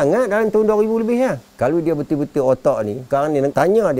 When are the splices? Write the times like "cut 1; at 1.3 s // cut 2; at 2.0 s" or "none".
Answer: cut 1; at 1.5 s